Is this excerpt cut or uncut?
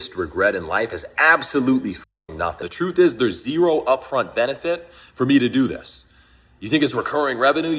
cut